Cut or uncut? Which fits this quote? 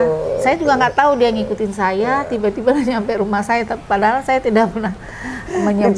uncut